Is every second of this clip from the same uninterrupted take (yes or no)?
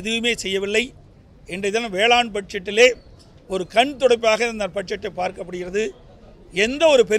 yes